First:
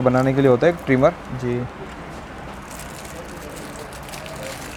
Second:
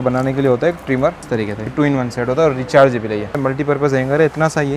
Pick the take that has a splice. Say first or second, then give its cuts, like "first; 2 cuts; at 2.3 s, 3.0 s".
second; 2 cuts; at 1.7 s, 3.4 s